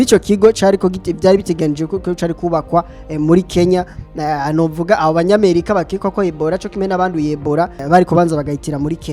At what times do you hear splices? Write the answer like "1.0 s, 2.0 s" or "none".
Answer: 7.8 s